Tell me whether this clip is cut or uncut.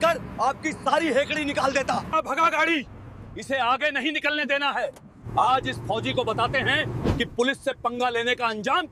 cut